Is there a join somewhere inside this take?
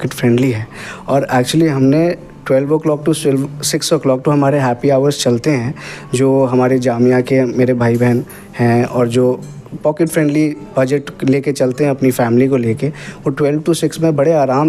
no; 0 cuts

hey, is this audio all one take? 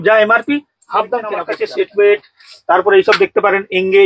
no; 1 cut; at 1.5 s

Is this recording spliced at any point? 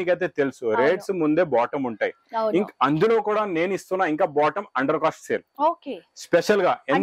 no; 0 cuts

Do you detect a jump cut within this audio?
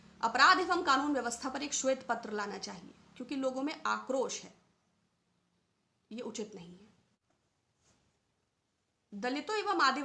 no; 0 cuts

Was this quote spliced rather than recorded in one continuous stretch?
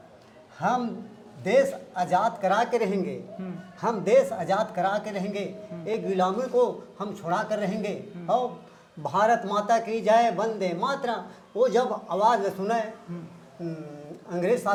no; 0 cuts

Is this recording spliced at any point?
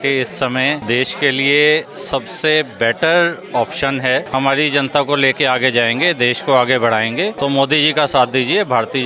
yes; 3 cuts; at 0.8 s, 4.3 s, 7.3 s

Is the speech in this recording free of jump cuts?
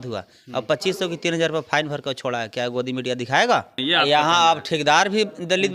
no; 1 cut; at 3.8 s

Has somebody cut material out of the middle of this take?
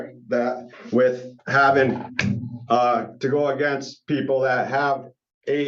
no; 0 cuts

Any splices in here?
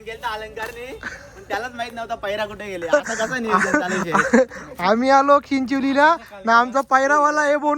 no; 0 cuts

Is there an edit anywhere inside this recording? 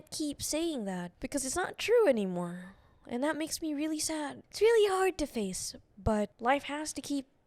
yes; 3 cuts; at 1.1 s, 4.4 s, 6.3 s

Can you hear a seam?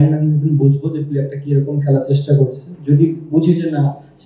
no; 0 cuts

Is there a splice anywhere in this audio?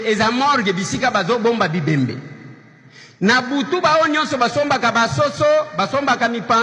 no; 0 cuts

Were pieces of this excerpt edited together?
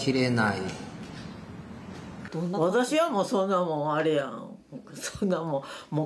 yes; 1 cut; at 2.3 s

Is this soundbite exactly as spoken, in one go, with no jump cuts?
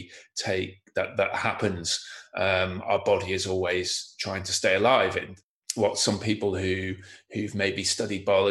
no; 1 cut; at 5.3 s

